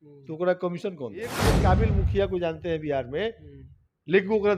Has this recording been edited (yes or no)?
yes